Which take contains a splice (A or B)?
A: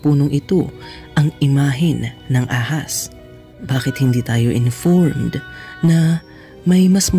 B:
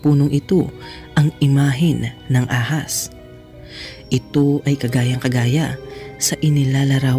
A